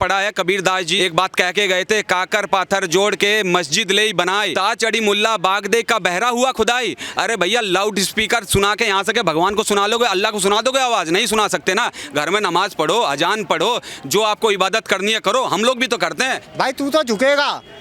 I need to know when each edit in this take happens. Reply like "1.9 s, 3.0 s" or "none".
0.9 s, 4.5 s, 16.4 s

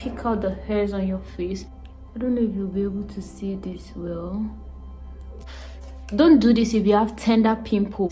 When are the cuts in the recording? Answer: 1.8 s, 5.5 s

